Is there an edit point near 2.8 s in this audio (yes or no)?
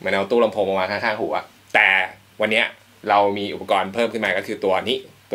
no